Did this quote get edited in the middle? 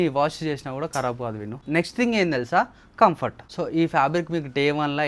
no; 0 cuts

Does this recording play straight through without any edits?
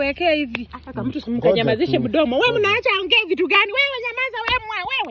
yes; 0 cuts

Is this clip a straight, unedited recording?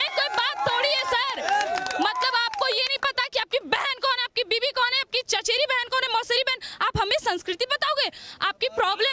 yes; 0 cuts

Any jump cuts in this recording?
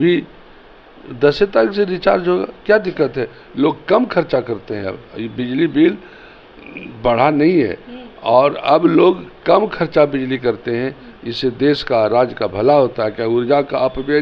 no; 0 cuts

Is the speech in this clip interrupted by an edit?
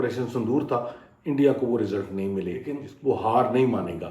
yes; 1 cut; at 2.8 s

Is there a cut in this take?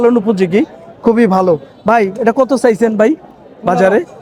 no; 0 cuts

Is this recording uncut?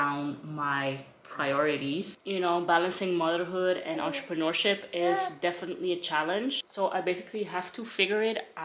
no; 2 cuts; at 2.2 s, 6.6 s

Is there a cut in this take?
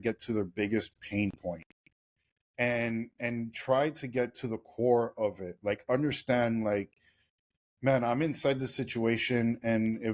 no; 0 cuts

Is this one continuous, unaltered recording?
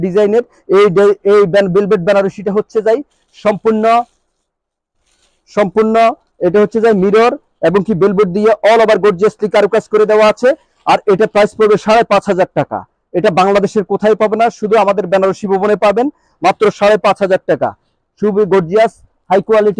yes; 0 cuts

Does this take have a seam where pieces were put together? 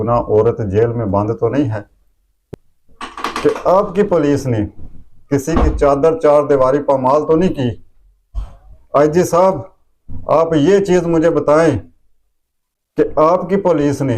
yes; 1 cut; at 2.4 s

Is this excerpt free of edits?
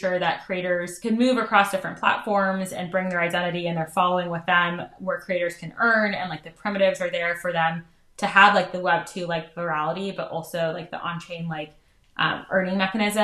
no; 1 cut; at 0.9 s

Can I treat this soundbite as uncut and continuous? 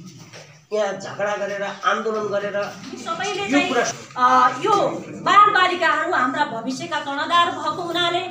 no; 1 cut; at 3.9 s

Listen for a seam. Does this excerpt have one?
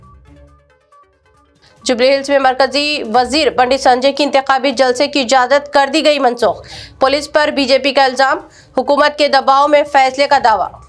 yes; 1 cut; at 1.0 s

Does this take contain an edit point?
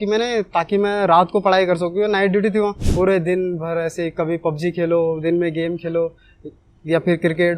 yes; 1 cut; at 2.8 s

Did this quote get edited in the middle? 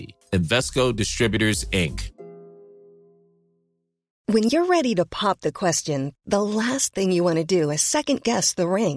yes; 1 cut; at 4.1 s

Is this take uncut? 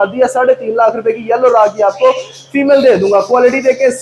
yes; 0 cuts

